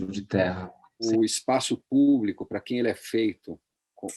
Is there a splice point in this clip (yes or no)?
yes